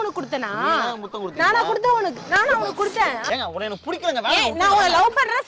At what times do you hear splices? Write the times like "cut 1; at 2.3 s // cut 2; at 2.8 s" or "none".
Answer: cut 1; at 3.3 s